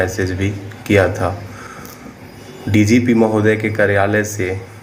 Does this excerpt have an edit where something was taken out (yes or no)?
no